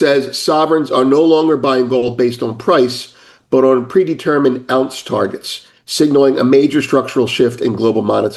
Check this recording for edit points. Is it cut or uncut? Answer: uncut